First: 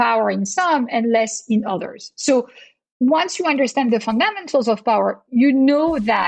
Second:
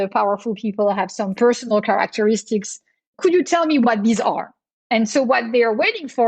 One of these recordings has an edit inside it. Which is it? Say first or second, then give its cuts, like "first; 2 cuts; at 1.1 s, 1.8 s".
second; 1 cut; at 3.2 s